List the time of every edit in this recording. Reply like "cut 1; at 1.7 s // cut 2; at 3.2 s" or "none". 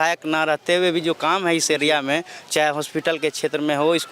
none